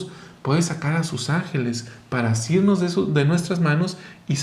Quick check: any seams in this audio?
no; 0 cuts

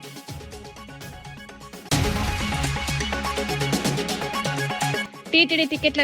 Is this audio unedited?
no; 3 cuts; at 1.9 s, 3.4 s, 5.1 s

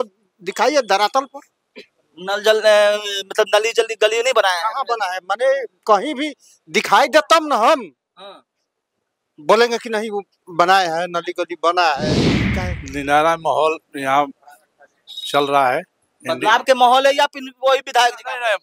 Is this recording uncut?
no; 1 cut; at 12.3 s

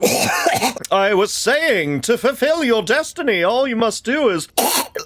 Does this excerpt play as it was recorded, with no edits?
yes; 0 cuts

